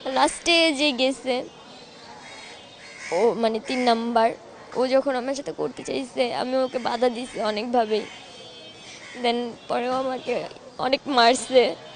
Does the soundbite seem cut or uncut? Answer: uncut